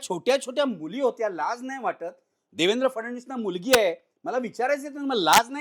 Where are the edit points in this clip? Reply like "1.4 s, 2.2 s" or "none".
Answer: none